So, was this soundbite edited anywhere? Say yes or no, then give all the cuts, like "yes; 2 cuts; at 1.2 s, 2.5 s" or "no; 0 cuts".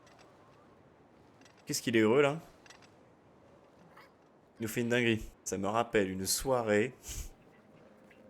yes; 2 cuts; at 4.5 s, 5.3 s